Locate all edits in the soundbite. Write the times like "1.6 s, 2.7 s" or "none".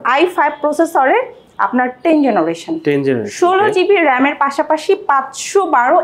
none